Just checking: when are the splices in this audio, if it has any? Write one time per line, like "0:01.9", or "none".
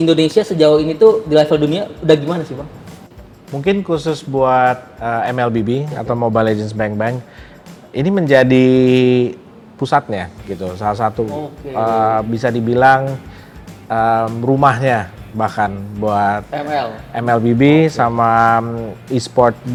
none